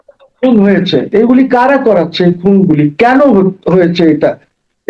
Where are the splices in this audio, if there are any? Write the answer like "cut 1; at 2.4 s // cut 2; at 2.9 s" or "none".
cut 1; at 1.1 s

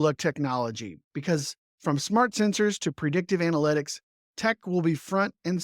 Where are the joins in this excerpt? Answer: cut 1; at 1.6 s

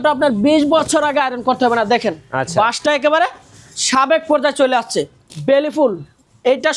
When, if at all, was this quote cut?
cut 1; at 5.2 s

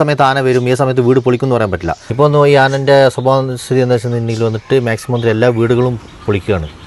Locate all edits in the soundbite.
cut 1; at 2.0 s

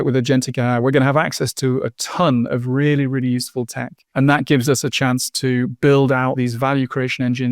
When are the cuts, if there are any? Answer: cut 1; at 4.0 s // cut 2; at 6.4 s

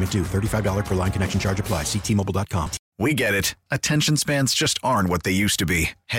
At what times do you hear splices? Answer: cut 1; at 2.8 s

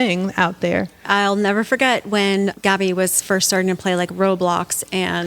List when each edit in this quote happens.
cut 1; at 1.0 s // cut 2; at 2.6 s

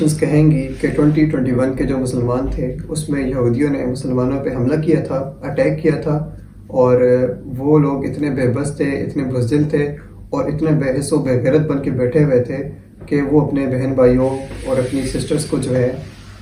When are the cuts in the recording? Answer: none

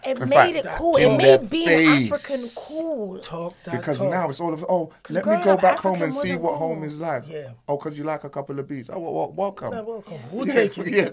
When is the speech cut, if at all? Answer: none

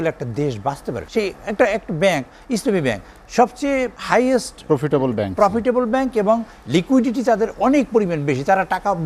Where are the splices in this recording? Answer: cut 1; at 1.0 s // cut 2; at 4.0 s

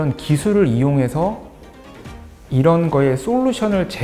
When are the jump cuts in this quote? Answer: none

